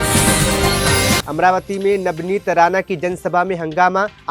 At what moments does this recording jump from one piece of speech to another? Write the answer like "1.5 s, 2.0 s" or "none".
1.2 s

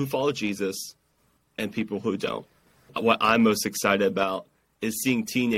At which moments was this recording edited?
2.9 s

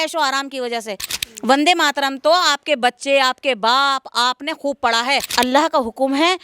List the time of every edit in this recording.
1.1 s, 5.3 s

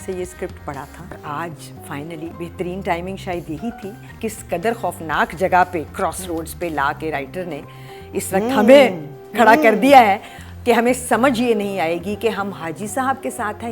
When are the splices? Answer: 1.2 s, 2.3 s, 4.1 s

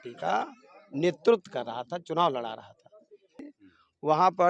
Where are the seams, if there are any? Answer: 3.3 s

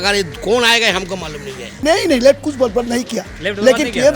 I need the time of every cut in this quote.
1.7 s

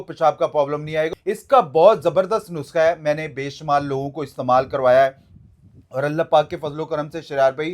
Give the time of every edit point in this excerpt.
1.1 s

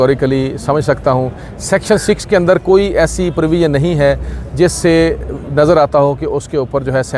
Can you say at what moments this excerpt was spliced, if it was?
none

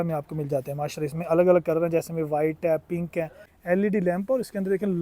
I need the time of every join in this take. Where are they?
3.5 s

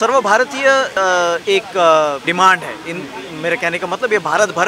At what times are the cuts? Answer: 0.9 s, 2.2 s

